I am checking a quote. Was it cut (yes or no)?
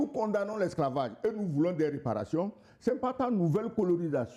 no